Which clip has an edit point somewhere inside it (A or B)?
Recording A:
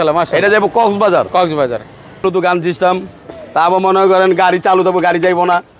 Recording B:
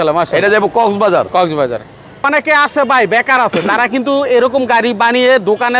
B